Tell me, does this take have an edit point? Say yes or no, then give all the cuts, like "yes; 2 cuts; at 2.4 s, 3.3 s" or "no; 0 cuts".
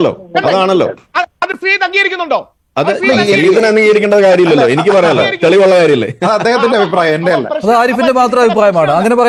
no; 0 cuts